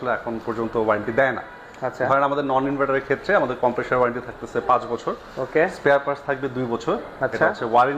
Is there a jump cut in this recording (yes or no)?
no